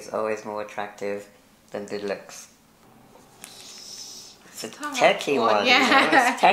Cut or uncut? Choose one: uncut